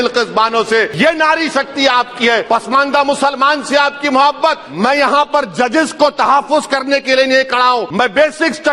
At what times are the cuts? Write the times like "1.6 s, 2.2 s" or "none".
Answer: 0.9 s, 2.4 s, 4.7 s, 7.9 s

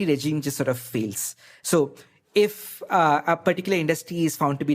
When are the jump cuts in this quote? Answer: 1.5 s

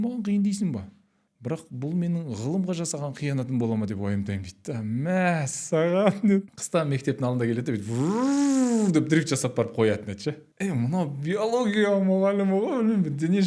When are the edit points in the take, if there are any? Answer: 6.4 s, 10.5 s

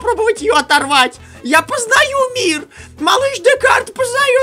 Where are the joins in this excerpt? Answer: none

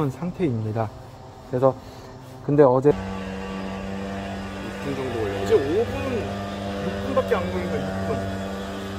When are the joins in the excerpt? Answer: 2.9 s

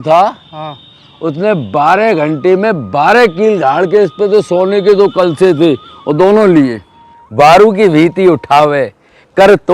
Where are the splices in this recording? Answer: 7.2 s

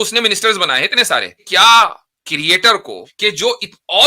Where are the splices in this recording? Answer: 1.4 s, 3.0 s

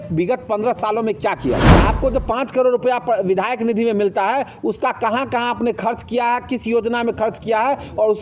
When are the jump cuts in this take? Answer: 1.7 s

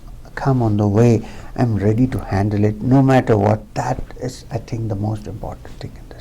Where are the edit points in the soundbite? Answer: 3.7 s

